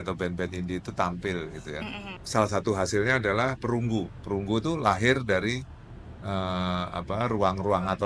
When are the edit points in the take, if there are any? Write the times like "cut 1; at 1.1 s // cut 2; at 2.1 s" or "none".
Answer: cut 1; at 2.1 s